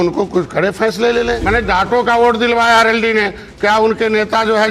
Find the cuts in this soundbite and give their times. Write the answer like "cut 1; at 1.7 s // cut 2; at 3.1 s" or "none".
cut 1; at 1.4 s